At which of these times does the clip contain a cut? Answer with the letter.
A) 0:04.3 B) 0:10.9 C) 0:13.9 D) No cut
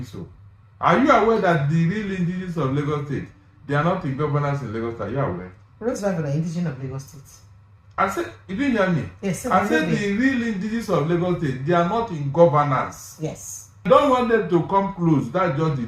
C